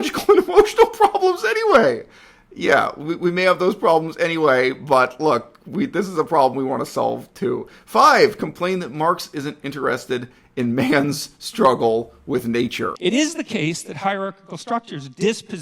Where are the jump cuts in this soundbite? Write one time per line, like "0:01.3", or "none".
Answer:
0:12.9